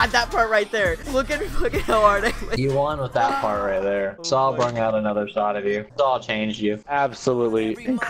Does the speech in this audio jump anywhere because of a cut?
yes; 3 cuts; at 1.0 s, 2.5 s, 4.2 s

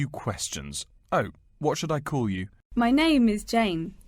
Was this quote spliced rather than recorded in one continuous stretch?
yes; 1 cut; at 2.5 s

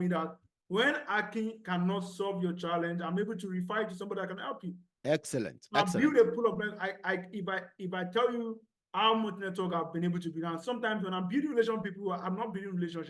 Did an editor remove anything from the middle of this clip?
no; 0 cuts

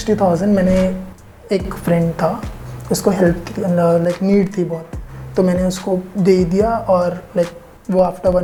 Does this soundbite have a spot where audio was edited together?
no; 0 cuts

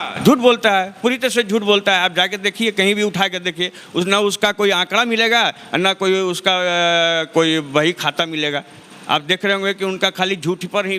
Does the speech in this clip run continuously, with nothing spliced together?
yes; 0 cuts

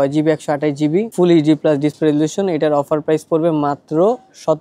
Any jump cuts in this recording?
no; 0 cuts

